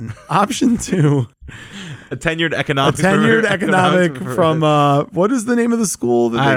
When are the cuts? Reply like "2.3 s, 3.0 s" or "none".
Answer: none

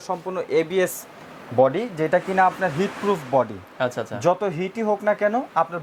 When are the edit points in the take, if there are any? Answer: none

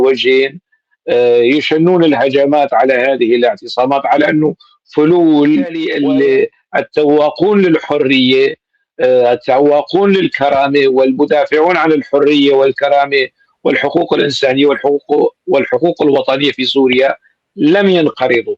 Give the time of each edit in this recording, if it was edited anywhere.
6.0 s

